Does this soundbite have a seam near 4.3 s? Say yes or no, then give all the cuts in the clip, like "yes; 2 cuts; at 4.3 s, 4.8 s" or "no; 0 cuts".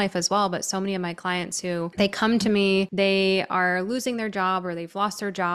no; 2 cuts; at 1.9 s, 2.9 s